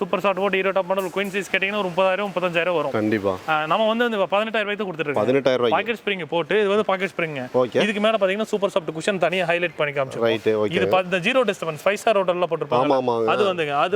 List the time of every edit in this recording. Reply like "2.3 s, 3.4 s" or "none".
none